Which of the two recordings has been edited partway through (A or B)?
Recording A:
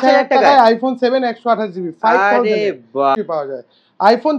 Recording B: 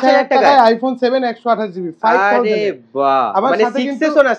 A